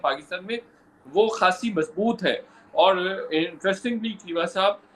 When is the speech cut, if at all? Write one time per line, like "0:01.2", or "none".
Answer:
none

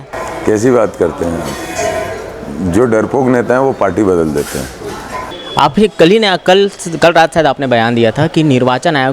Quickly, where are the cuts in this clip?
0:05.2

